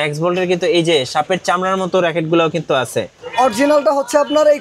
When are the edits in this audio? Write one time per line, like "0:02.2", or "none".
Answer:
0:03.2